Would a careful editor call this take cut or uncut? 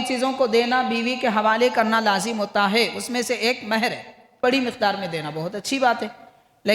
cut